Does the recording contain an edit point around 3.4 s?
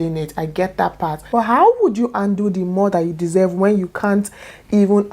no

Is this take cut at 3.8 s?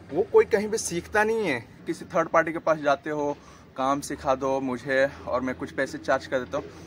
no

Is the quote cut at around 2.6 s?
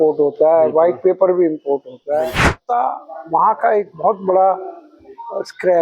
yes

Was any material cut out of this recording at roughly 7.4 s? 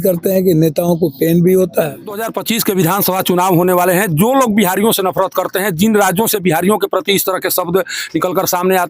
no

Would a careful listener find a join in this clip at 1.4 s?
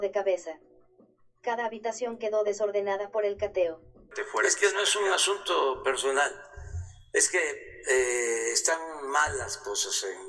no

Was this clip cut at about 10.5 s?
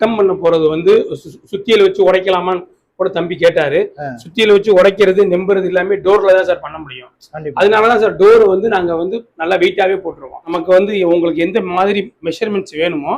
yes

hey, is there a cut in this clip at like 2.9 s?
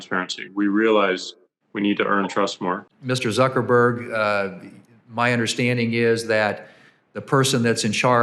yes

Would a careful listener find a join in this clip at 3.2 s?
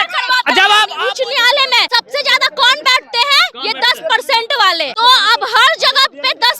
no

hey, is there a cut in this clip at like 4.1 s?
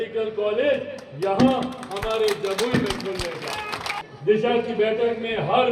yes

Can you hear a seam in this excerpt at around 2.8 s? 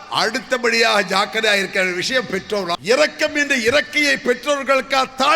yes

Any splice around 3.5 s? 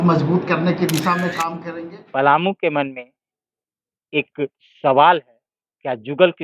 no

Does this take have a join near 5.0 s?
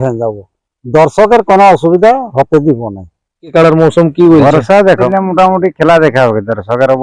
yes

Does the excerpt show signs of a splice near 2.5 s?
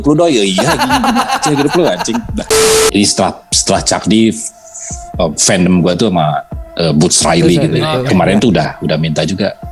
yes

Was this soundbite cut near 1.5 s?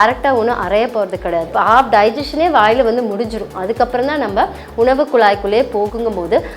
yes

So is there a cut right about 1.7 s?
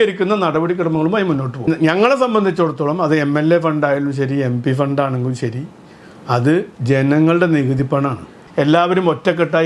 yes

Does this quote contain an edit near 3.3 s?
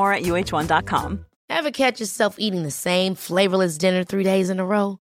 no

